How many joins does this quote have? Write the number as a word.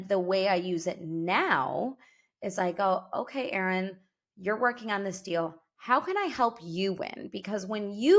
zero